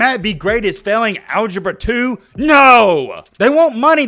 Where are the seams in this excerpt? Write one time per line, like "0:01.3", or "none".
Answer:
0:03.2